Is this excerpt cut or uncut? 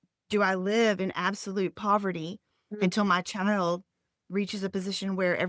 uncut